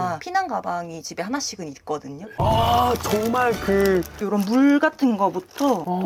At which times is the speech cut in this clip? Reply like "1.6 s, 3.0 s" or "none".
none